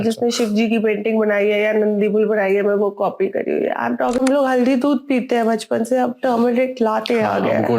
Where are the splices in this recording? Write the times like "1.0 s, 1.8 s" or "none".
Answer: 4.2 s